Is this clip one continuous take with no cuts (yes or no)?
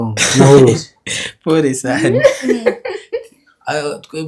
yes